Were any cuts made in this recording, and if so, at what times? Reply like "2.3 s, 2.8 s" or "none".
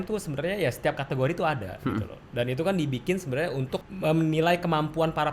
3.9 s

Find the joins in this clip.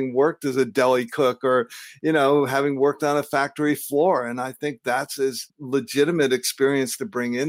5.5 s

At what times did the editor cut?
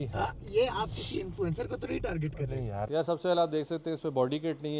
2.9 s

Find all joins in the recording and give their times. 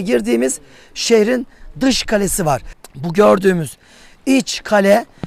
2.8 s

